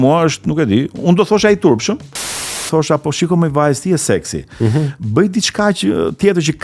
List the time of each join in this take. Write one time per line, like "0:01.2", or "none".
0:02.5

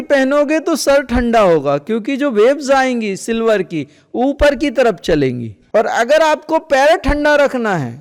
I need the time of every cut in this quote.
none

